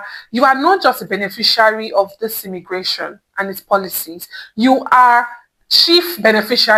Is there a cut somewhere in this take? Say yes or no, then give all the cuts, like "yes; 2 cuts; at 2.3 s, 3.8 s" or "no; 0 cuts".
no; 0 cuts